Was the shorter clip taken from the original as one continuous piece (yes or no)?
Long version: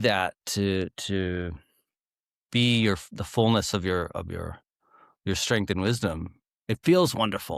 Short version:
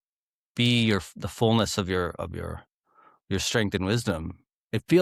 yes